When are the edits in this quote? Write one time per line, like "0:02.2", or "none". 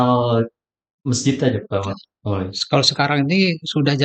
none

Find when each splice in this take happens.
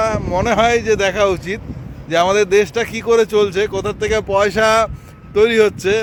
none

